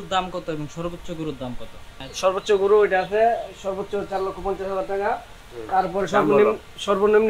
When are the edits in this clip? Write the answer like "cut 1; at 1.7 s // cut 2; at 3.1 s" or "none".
none